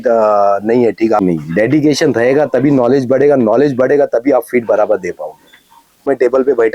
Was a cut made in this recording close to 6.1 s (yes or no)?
yes